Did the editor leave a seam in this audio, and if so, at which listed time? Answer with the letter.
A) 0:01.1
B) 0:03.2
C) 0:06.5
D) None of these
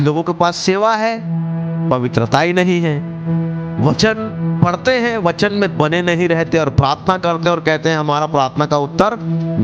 B